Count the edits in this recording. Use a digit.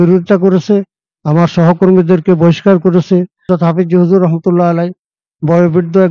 1